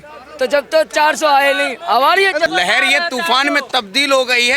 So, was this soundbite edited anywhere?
yes; 1 cut; at 2.5 s

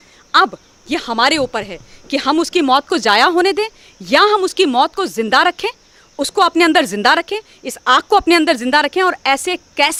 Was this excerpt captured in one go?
yes; 0 cuts

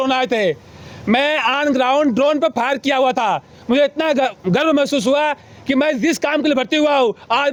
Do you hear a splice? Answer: no; 0 cuts

